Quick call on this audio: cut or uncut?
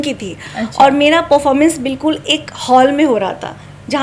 uncut